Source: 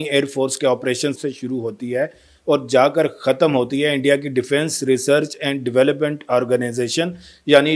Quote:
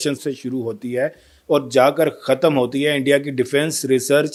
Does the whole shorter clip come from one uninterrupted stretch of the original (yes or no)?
yes